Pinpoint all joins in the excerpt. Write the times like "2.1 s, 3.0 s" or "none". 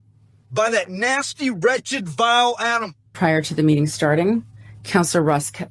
3.1 s